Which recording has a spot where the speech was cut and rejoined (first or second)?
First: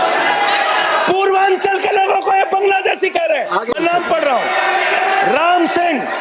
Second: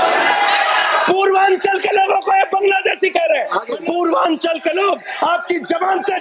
second